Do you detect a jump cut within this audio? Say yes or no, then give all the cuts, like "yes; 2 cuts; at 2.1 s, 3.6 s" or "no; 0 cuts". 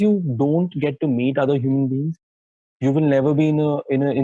no; 0 cuts